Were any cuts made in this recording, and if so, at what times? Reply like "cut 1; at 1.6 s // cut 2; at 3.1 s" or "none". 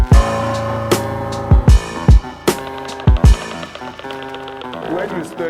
none